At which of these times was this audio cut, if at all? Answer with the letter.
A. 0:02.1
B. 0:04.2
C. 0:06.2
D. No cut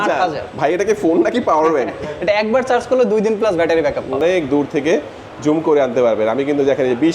B